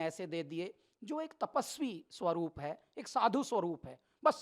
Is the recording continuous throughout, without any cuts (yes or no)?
yes